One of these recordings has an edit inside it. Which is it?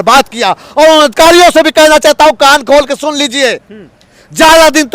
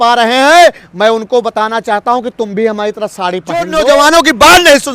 second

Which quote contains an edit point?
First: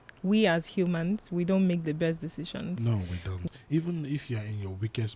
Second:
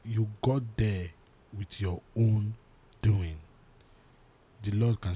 first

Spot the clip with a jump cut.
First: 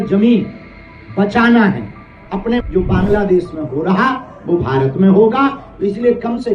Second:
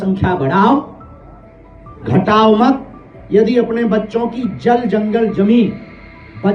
first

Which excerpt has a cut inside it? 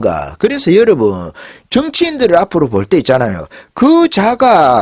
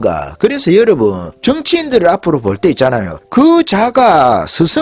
second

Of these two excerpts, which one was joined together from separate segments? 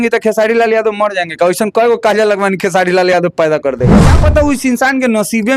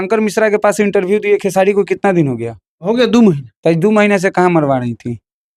first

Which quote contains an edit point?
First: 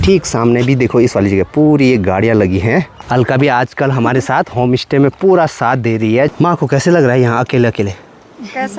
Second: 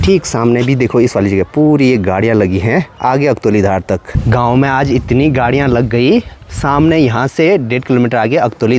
first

